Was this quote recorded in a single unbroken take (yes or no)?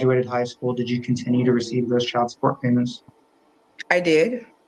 yes